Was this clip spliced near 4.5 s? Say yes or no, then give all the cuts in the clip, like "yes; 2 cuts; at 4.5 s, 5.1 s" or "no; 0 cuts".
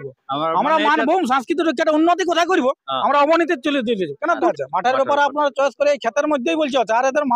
yes; 1 cut; at 4.5 s